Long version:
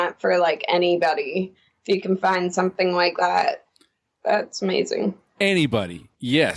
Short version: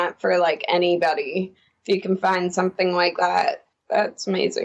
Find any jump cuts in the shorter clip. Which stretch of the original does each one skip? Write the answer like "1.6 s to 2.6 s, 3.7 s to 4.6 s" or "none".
3.7 s to 4.1 s